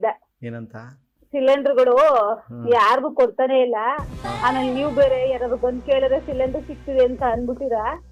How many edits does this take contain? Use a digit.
0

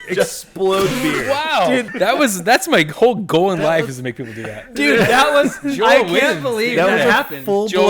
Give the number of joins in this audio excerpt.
1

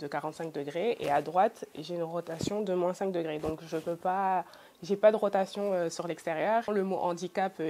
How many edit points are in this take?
1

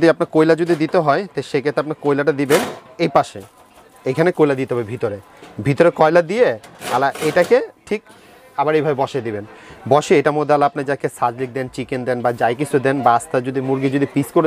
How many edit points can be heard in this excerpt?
0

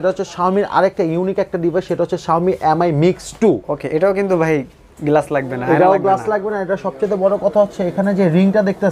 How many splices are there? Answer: 0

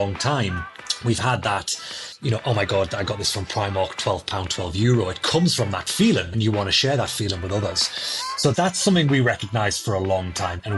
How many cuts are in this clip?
0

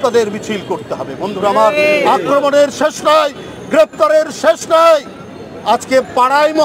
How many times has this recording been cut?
0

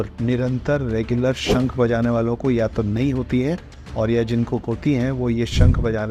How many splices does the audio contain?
0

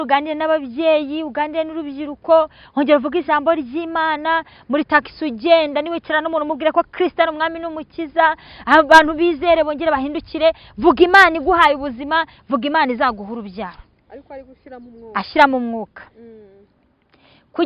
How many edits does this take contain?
0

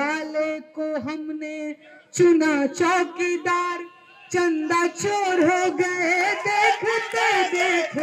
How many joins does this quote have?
0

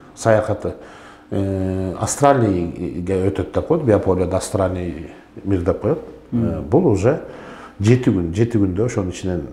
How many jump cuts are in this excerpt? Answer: 0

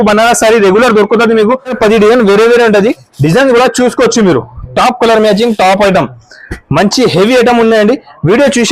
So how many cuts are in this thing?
1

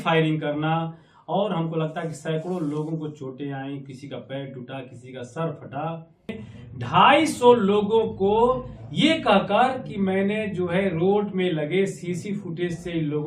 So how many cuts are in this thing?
1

